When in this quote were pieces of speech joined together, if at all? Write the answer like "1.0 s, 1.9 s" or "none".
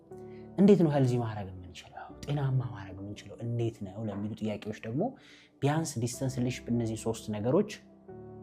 none